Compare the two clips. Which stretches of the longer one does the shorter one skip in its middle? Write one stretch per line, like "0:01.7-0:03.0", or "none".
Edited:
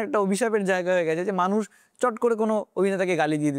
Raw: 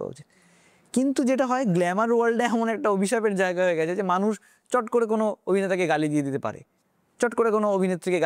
none